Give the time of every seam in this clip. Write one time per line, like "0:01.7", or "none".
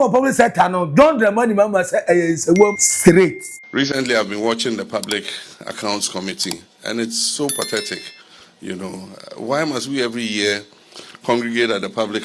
0:02.9